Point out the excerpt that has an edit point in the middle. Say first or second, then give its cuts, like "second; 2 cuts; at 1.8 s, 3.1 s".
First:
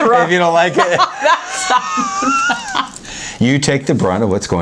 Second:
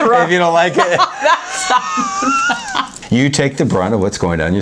second; 1 cut; at 3.0 s